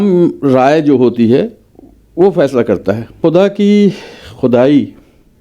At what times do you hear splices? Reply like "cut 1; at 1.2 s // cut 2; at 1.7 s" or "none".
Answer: cut 1; at 3.2 s